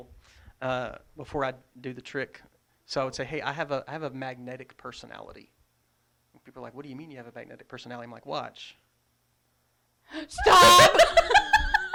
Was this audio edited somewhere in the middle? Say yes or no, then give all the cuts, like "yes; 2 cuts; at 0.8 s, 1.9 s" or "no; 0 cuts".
no; 0 cuts